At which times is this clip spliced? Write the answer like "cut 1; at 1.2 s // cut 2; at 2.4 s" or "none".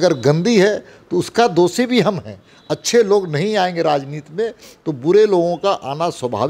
none